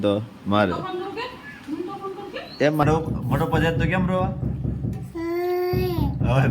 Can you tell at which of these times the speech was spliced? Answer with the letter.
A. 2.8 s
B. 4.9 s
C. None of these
A